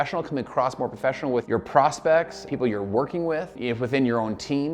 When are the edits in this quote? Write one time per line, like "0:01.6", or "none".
0:02.4
0:03.6